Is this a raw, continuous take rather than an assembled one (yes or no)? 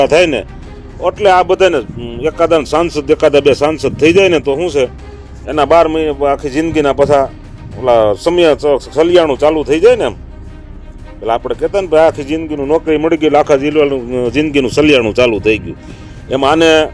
yes